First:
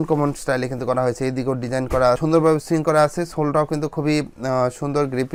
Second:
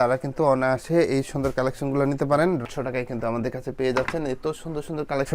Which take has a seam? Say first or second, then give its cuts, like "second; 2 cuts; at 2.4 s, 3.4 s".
second; 1 cut; at 2.6 s